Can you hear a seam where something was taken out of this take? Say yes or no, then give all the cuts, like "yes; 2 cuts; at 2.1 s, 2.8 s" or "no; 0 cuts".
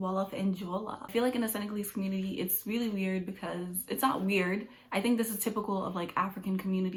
no; 0 cuts